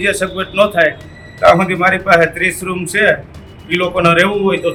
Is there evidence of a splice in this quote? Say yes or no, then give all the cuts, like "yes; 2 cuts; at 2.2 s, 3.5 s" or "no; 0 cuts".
no; 0 cuts